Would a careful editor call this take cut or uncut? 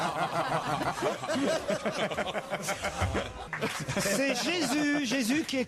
uncut